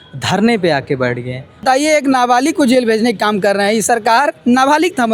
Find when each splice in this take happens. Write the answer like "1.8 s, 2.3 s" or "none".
1.6 s